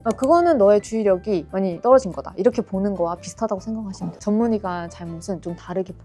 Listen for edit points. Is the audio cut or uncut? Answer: cut